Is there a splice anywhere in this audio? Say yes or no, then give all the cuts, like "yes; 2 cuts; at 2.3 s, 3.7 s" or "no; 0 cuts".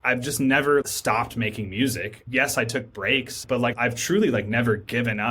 yes; 3 cuts; at 0.8 s, 2.2 s, 3.6 s